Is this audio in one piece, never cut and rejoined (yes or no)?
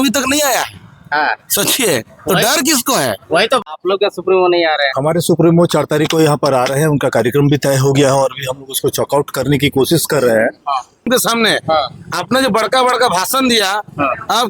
no